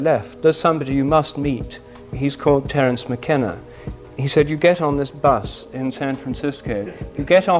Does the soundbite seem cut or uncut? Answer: cut